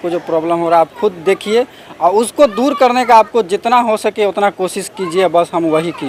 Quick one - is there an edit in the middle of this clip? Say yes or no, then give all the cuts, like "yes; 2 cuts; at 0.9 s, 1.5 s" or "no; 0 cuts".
no; 0 cuts